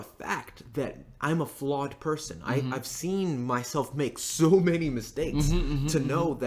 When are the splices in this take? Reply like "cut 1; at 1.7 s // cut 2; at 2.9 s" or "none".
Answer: none